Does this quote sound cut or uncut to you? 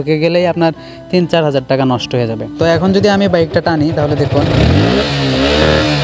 cut